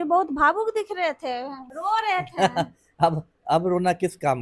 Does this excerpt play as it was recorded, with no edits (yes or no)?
no